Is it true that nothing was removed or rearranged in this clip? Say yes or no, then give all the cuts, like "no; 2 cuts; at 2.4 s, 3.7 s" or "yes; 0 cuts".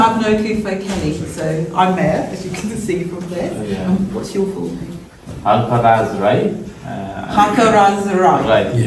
yes; 0 cuts